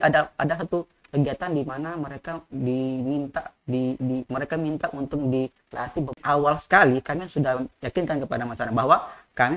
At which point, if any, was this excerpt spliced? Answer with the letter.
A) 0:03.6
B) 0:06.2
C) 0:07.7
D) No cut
B